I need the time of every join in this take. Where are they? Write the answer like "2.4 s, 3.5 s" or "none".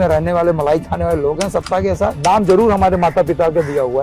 2.2 s